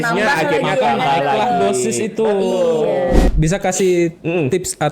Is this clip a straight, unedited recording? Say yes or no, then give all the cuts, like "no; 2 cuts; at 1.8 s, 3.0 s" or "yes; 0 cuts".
no; 1 cut; at 3.3 s